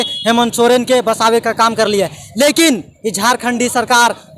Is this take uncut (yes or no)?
yes